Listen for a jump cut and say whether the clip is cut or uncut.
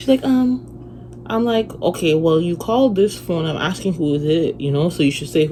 uncut